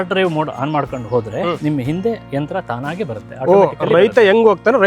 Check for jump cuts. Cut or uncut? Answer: uncut